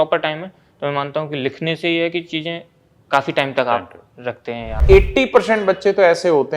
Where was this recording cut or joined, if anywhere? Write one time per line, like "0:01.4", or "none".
0:04.8